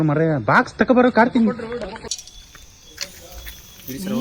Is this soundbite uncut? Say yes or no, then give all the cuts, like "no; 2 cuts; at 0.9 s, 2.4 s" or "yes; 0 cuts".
no; 1 cut; at 2.1 s